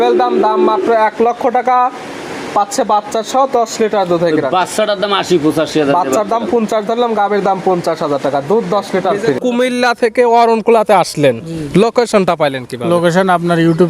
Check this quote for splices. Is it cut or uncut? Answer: cut